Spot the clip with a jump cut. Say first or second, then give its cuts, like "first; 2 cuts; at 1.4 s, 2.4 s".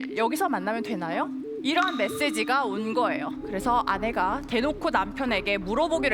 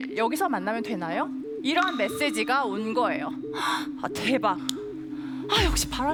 first; 1 cut; at 3.4 s